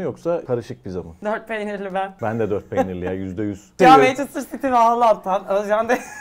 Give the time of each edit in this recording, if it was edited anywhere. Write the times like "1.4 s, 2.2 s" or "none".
0.7 s, 2.1 s, 3.8 s